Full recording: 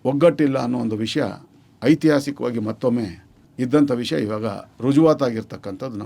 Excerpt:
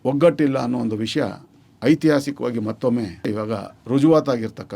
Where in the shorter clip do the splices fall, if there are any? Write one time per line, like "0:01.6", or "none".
0:03.3